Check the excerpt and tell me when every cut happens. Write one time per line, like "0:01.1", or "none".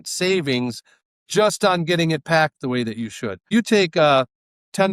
0:03.5